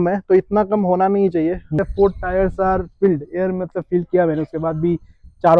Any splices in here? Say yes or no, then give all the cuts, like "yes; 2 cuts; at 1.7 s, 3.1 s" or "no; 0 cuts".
yes; 1 cut; at 1.7 s